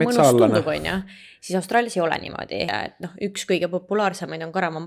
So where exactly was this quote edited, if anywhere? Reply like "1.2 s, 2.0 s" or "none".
2.7 s